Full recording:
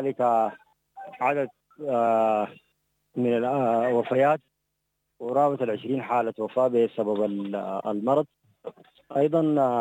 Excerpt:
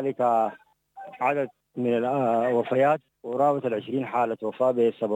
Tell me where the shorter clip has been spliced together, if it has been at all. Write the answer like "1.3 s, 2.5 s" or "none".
1.6 s, 3.2 s